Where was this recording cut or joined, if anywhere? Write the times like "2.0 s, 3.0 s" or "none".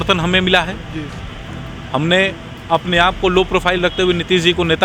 none